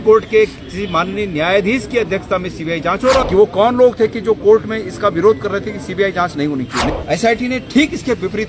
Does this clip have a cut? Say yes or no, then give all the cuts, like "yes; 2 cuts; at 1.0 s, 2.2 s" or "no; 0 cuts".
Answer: yes; 2 cuts; at 3.2 s, 6.9 s